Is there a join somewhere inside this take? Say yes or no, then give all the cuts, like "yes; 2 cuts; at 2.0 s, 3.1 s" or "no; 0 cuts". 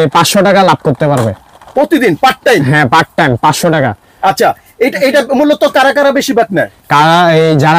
no; 0 cuts